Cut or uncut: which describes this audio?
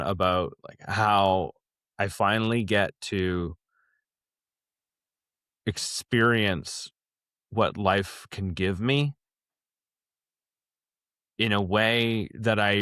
uncut